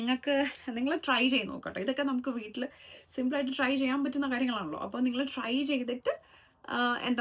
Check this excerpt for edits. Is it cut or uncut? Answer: uncut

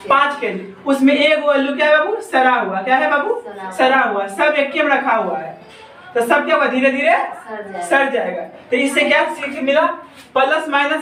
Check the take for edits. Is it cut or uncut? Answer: uncut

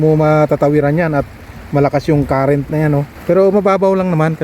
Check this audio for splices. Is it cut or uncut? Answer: cut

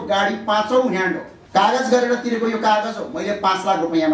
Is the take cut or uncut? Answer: cut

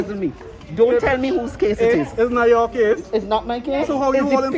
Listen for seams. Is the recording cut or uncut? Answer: uncut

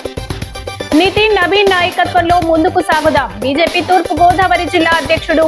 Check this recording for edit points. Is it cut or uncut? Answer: cut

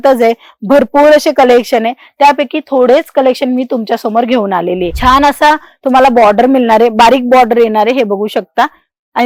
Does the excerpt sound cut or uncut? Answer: cut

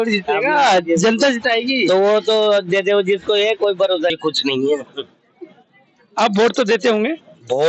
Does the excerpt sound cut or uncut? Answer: cut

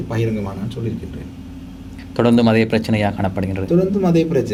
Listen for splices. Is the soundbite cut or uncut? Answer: uncut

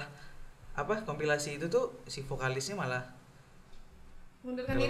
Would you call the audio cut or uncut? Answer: uncut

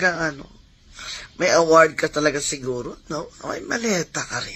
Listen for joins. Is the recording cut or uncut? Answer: uncut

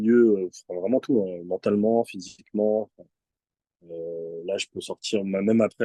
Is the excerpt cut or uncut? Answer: uncut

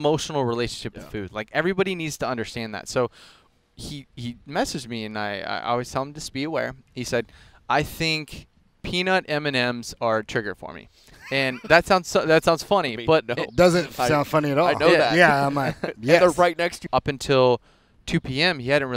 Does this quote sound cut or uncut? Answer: cut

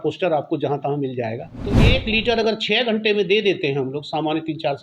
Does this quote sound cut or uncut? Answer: cut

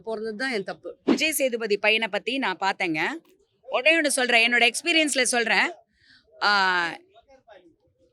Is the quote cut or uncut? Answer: cut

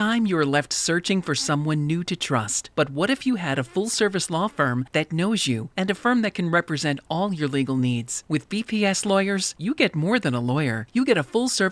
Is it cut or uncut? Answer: uncut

